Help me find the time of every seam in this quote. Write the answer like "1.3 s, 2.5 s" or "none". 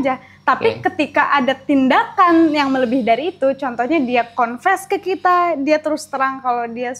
none